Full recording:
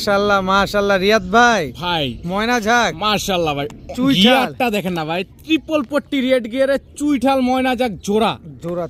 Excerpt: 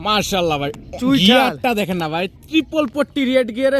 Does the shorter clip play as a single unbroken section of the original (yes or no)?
yes